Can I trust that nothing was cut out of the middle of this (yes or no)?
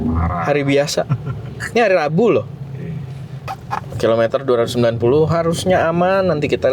no